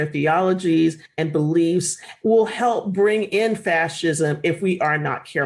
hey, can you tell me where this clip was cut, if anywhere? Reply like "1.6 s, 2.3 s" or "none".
2.0 s